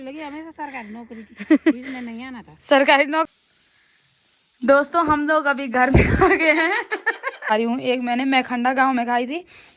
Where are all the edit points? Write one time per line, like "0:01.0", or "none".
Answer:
0:03.3
0:07.5